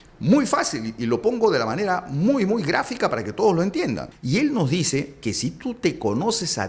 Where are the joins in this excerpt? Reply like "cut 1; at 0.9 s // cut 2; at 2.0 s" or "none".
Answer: cut 1; at 4.1 s